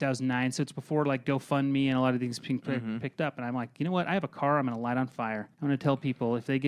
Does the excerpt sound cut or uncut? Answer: cut